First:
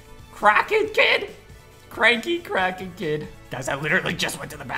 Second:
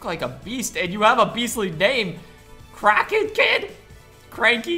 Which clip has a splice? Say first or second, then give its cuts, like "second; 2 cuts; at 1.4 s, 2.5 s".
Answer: first; 1 cut; at 3.4 s